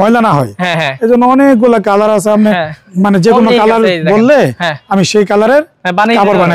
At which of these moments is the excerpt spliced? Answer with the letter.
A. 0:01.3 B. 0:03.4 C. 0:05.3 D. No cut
D